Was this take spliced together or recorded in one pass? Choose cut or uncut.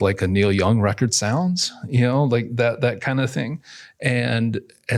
uncut